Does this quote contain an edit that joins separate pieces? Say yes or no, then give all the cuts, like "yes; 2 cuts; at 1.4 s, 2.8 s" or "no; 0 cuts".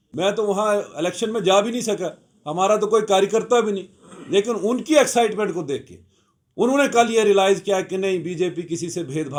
no; 0 cuts